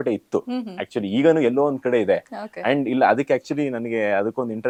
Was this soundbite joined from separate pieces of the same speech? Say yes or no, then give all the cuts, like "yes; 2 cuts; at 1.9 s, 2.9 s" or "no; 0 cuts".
no; 0 cuts